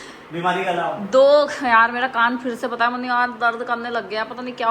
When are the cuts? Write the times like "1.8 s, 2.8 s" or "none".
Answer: none